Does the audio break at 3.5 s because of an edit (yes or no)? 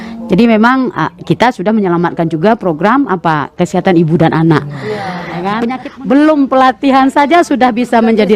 no